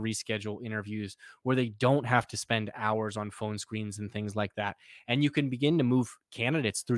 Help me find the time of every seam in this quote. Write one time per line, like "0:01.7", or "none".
none

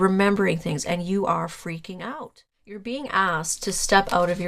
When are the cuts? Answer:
0:02.1

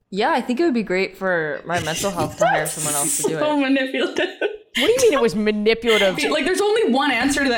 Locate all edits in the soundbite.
0:04.6
0:06.2

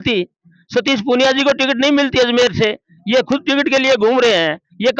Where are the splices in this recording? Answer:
none

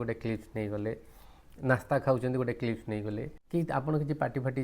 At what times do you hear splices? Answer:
0:03.3

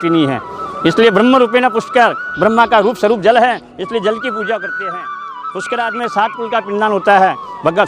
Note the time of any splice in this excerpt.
0:05.2

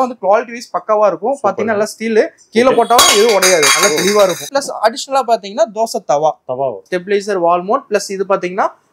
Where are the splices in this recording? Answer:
0:04.4
0:06.8

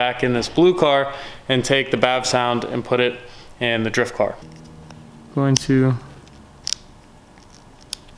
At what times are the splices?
0:04.4

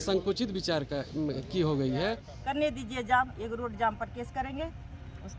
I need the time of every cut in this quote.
0:02.3

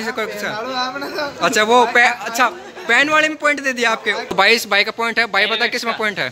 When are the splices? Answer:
0:04.2

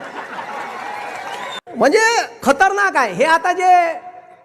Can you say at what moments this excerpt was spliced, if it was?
0:01.6

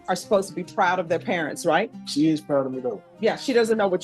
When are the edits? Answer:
0:02.0
0:03.0

